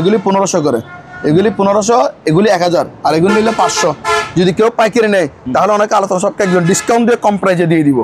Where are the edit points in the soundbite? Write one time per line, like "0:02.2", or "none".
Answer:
none

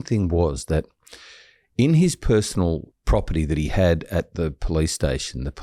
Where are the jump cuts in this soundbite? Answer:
0:02.9

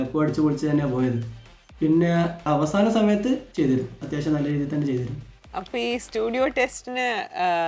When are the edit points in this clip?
none

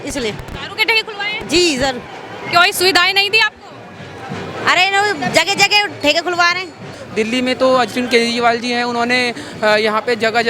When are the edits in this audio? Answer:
0:07.0

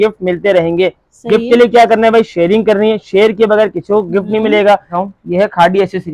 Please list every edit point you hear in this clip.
0:05.0

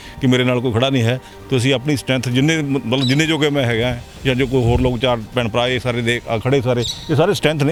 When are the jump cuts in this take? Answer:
none

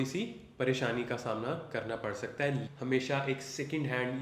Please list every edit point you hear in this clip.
0:02.7

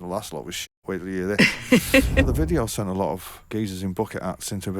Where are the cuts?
0:02.2
0:03.5

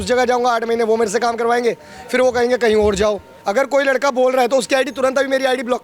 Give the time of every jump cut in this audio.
0:03.3

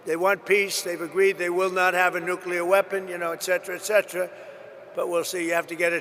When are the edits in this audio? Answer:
none

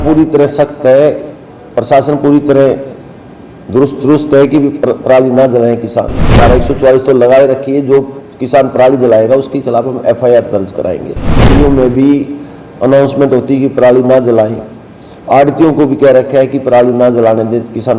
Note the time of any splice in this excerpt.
0:06.3
0:11.5

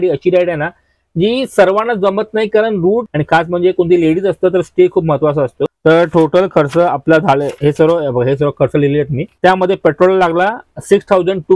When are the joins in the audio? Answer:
0:03.1
0:05.7
0:09.3

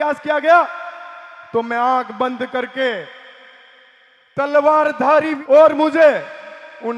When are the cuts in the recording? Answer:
0:05.4

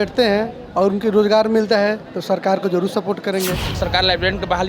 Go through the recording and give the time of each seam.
0:03.8

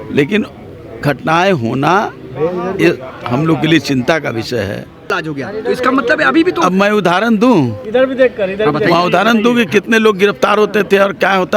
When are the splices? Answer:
0:05.2

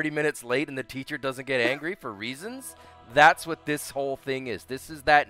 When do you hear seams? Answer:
none

